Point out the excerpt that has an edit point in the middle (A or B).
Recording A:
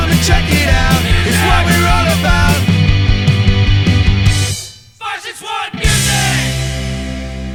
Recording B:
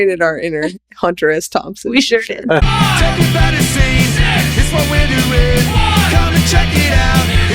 B